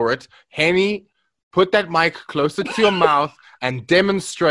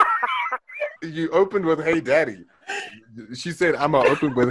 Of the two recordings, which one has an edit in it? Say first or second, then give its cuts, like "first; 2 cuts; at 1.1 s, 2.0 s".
second; 1 cut; at 1.0 s